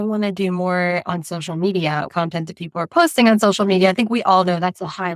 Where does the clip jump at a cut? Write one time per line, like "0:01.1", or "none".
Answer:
0:02.1